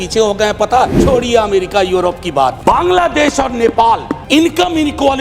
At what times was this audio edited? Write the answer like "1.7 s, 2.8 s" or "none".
1.0 s, 2.6 s, 4.1 s